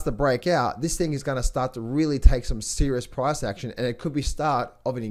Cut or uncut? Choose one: uncut